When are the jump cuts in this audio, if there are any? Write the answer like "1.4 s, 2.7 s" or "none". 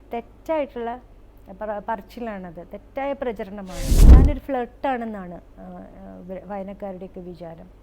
4.0 s

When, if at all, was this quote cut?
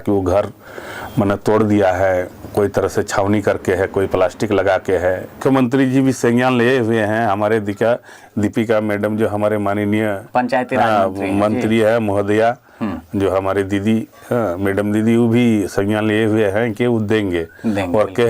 5.4 s

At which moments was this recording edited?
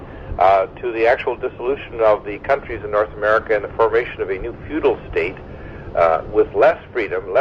1.9 s

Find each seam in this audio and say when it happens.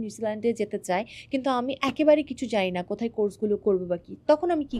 none

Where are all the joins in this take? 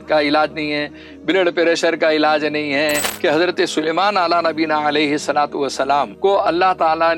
3.1 s, 6.1 s

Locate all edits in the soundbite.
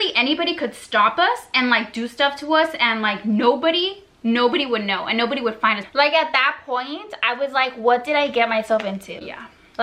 none

